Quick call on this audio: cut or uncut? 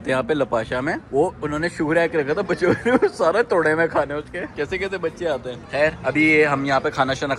uncut